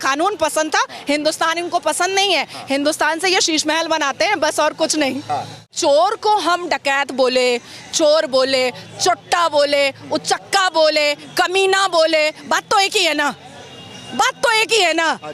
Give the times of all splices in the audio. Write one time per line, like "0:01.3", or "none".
0:05.7